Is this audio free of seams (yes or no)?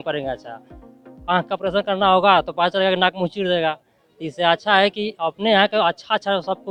yes